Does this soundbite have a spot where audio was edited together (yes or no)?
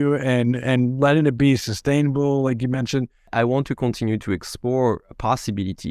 yes